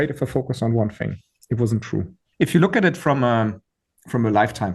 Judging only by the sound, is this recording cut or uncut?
cut